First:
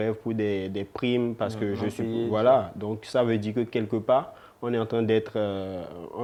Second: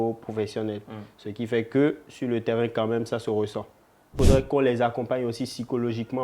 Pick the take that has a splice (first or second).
second